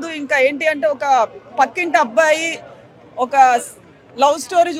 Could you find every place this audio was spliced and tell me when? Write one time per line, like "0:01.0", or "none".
none